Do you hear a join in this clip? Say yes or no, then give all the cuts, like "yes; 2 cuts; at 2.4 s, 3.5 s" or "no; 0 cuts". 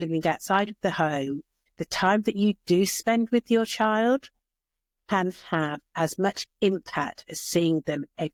no; 0 cuts